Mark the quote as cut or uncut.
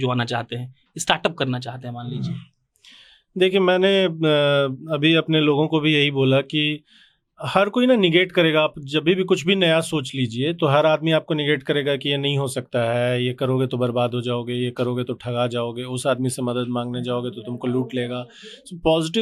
uncut